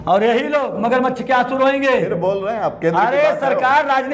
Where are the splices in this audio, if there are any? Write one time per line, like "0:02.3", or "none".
none